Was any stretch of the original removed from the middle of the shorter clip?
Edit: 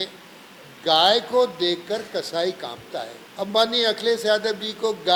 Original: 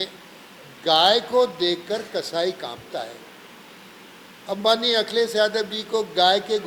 yes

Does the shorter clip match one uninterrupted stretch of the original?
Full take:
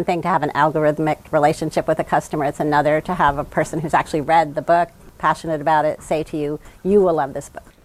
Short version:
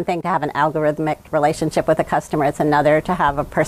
yes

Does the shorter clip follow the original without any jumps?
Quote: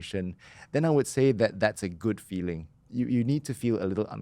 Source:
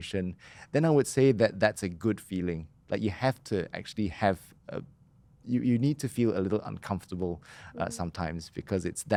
no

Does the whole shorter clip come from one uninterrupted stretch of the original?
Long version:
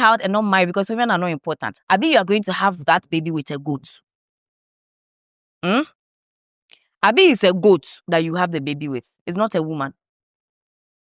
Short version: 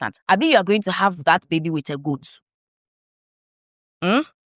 yes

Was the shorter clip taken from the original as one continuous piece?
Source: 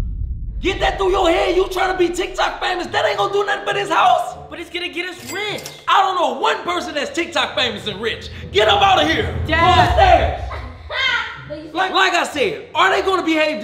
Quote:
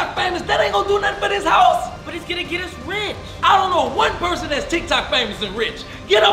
yes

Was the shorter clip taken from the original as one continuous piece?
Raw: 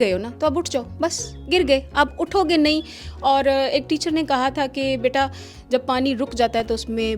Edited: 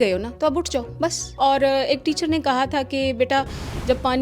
no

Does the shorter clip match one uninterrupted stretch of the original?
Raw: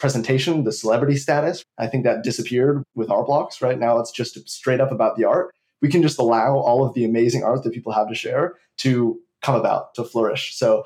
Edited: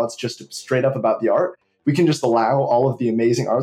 yes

